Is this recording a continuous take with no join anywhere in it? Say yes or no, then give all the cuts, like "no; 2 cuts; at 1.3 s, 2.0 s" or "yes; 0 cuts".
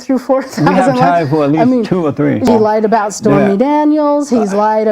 no; 1 cut; at 2.5 s